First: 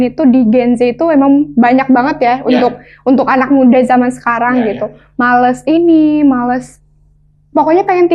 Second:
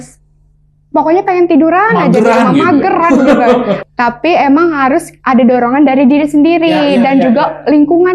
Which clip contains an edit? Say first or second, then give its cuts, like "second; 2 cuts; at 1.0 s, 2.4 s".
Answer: second; 1 cut; at 3.8 s